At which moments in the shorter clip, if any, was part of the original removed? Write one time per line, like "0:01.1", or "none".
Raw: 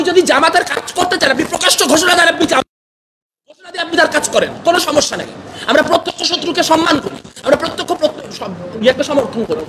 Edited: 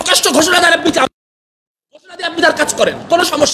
none